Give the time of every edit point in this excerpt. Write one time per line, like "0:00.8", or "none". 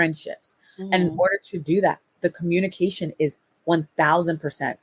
none